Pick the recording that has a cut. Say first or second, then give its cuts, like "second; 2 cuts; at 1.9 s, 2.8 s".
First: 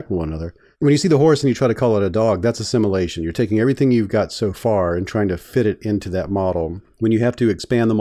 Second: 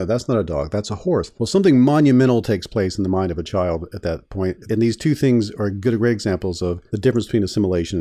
second; 2 cuts; at 1.3 s, 6.8 s